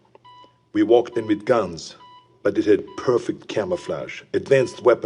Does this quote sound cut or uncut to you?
cut